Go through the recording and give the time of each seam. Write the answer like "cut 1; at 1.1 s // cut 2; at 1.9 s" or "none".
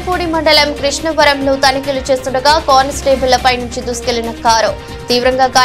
none